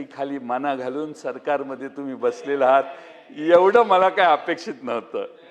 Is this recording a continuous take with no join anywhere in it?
yes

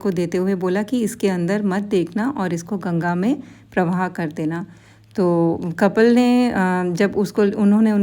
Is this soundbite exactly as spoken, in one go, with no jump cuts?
yes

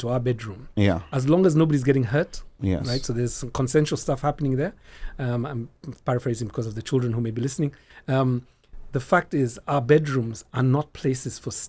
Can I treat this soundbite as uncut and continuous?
yes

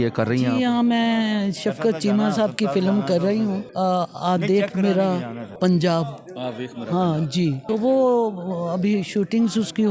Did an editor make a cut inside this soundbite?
yes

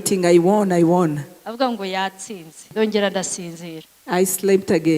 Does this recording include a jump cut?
yes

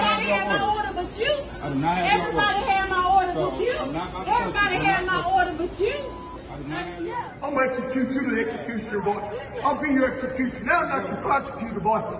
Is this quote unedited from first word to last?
no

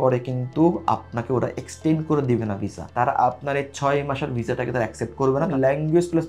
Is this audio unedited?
no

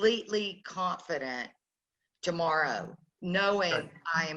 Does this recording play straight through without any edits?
yes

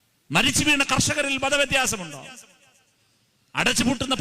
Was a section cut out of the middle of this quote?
no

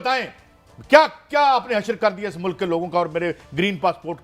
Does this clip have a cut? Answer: no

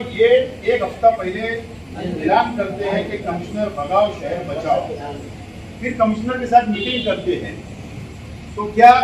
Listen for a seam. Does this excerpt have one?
no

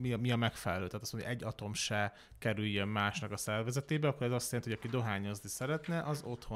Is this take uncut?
yes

